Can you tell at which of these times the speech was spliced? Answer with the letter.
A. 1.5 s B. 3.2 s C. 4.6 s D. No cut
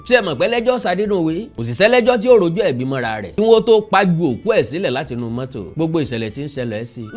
B